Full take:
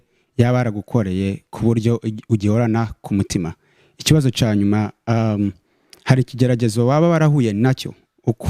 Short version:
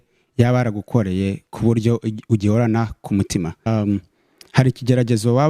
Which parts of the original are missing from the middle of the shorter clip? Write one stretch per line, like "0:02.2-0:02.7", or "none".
0:03.7-0:05.2